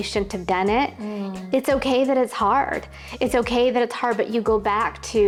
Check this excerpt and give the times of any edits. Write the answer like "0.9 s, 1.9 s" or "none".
none